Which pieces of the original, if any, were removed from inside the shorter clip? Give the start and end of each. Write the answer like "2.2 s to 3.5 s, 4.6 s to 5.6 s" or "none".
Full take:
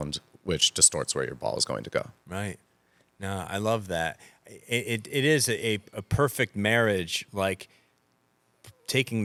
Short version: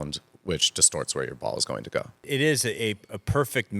2.2 s to 5.0 s